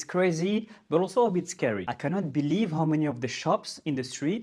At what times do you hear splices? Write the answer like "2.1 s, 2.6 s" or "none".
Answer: 1.9 s